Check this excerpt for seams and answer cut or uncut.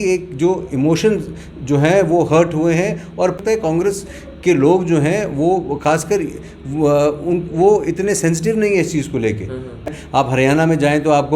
cut